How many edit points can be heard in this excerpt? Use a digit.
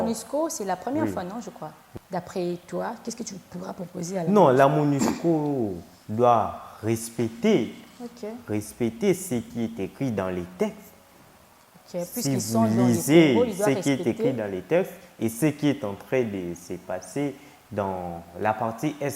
1